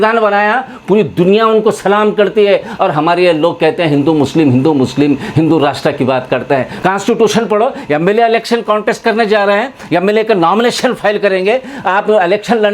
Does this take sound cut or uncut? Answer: cut